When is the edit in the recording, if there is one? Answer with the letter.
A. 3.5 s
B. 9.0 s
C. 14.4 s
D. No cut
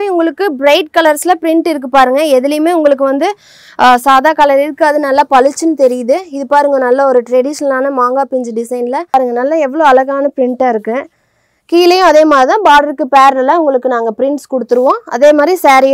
B